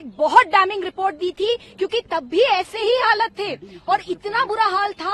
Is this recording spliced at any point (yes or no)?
no